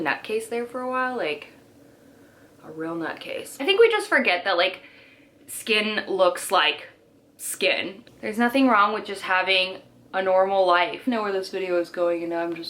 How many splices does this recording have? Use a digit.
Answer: 3